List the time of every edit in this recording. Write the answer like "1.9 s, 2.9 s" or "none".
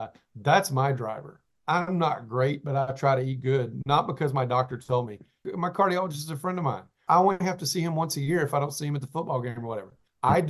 5.4 s, 7.0 s